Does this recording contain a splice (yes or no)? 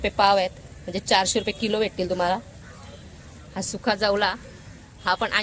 no